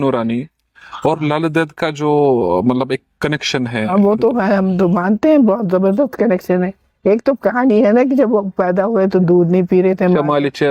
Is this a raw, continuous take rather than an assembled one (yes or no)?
yes